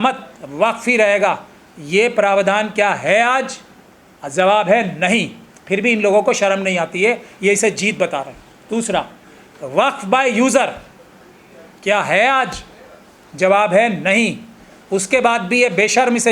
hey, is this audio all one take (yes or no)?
yes